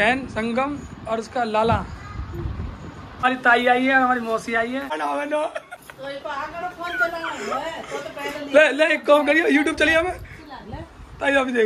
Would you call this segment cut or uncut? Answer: cut